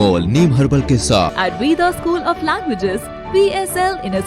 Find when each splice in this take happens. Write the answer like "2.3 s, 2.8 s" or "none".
1.3 s